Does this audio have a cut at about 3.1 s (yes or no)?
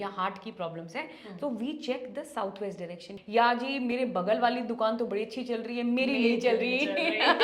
yes